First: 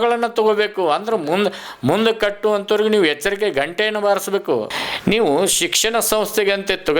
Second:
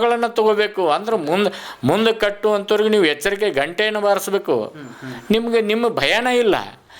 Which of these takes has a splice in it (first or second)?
first